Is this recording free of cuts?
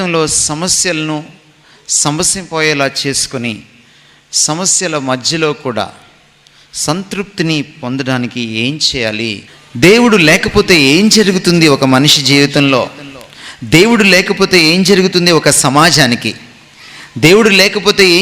no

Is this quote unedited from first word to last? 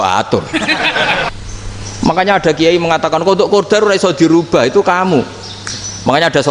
no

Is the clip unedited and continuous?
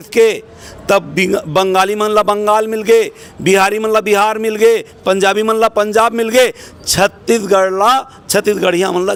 yes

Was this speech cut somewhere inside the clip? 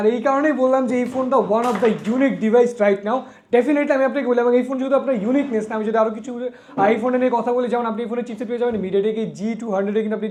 no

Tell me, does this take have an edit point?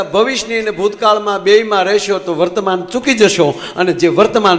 no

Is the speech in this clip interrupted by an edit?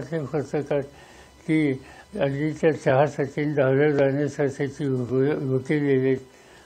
no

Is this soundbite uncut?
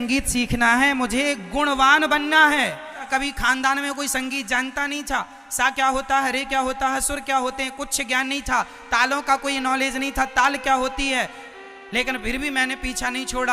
no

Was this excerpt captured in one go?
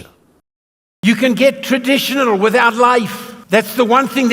no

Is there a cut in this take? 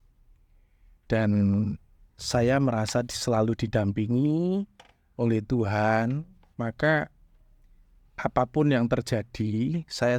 no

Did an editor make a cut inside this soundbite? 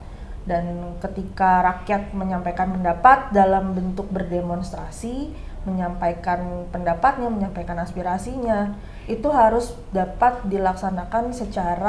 no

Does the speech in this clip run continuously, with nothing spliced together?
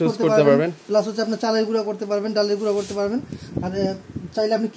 yes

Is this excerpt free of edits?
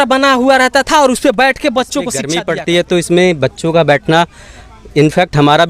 no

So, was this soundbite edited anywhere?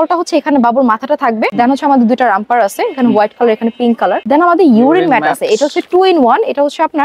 yes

